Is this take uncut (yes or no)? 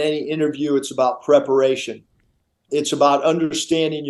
yes